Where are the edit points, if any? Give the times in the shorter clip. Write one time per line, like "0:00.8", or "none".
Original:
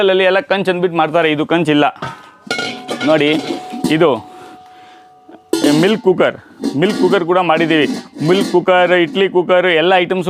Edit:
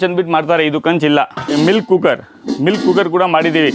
0:01.5